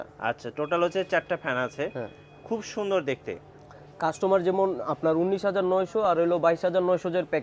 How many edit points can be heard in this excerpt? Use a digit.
0